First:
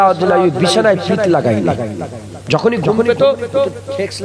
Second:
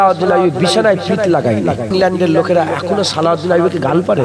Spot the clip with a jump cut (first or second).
second